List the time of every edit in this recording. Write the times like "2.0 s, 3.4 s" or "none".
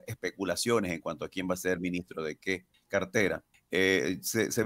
2.7 s, 3.5 s